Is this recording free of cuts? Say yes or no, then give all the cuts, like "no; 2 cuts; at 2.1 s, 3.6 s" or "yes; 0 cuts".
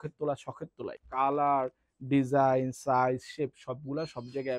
no; 1 cut; at 1.0 s